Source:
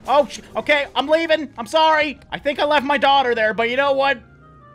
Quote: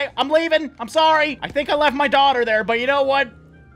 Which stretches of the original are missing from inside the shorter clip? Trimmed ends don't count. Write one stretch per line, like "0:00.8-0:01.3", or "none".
0:02.2-0:02.3